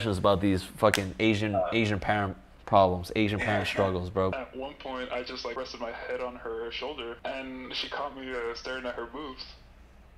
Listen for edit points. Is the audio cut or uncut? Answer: cut